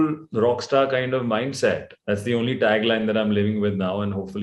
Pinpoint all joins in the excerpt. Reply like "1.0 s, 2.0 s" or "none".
1.9 s